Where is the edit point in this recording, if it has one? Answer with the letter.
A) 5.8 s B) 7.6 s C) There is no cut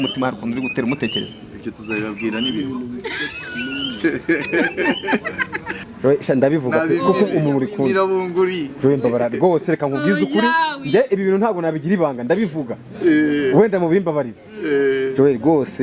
A